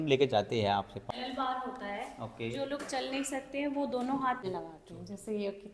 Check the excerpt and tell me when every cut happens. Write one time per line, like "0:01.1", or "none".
0:01.0
0:04.4